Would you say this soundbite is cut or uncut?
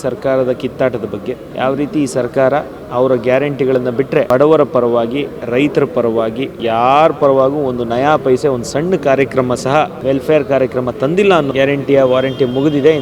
cut